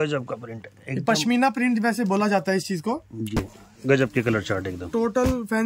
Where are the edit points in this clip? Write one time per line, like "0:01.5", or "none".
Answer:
0:03.4